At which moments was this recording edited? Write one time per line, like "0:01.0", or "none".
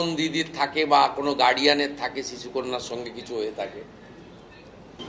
none

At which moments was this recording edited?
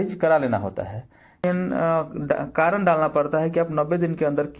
0:01.4

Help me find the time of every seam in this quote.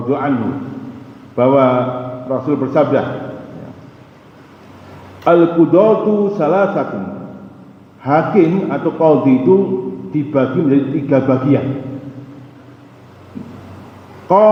none

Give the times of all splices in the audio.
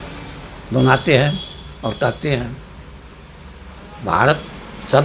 none

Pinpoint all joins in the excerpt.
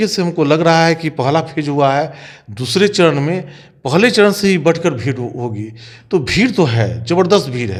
none

